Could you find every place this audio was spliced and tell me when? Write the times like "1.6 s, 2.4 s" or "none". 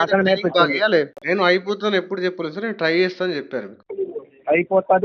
1.2 s